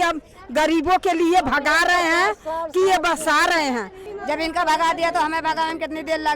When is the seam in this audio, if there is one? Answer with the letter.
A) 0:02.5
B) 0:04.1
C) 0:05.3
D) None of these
B